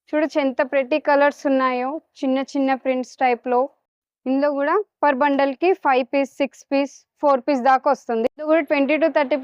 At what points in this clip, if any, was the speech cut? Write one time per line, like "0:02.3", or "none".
0:03.8
0:08.4